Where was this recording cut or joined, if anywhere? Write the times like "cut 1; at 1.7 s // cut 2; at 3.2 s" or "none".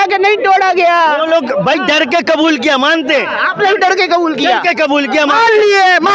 none

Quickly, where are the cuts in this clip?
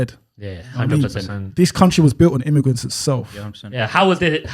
cut 1; at 3.6 s

